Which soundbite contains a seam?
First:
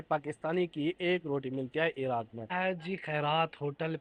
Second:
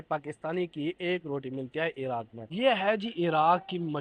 second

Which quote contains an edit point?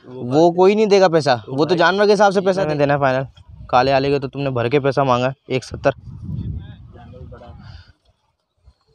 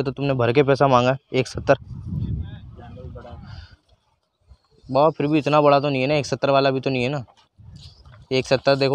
first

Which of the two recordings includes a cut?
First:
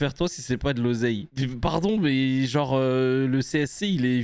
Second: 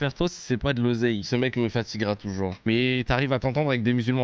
second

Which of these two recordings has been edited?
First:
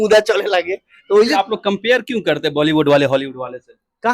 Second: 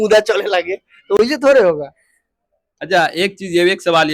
first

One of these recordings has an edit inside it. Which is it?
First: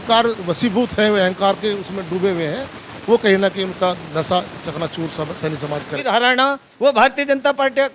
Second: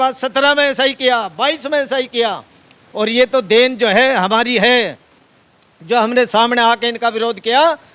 first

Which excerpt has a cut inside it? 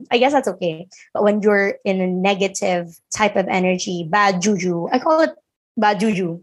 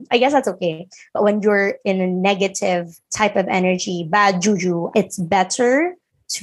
second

